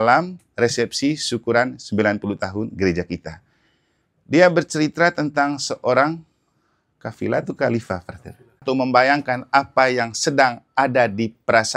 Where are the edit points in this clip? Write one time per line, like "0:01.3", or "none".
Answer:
0:08.6

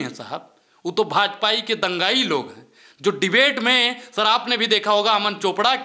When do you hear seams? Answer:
none

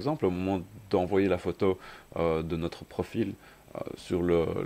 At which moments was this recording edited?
none

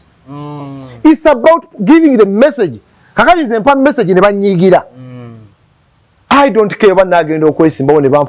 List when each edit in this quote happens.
none

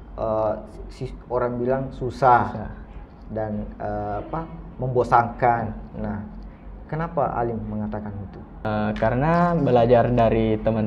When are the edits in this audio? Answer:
0:08.7

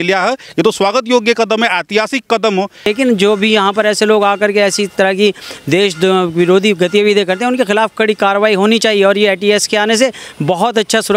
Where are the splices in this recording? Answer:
0:02.9

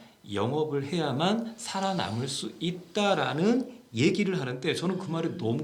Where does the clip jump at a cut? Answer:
none

